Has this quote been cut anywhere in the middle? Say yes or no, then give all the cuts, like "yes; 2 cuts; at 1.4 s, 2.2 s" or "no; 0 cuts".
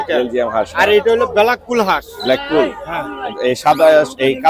no; 0 cuts